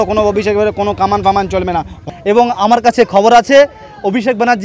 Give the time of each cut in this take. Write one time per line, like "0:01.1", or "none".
0:02.0